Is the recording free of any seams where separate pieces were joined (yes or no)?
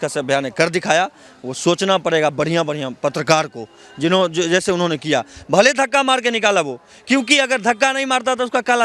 yes